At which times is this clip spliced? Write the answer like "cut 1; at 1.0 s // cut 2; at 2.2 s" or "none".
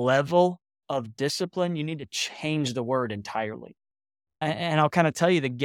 cut 1; at 4.4 s